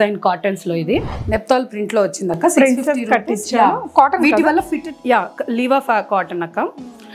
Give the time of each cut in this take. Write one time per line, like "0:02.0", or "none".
0:01.2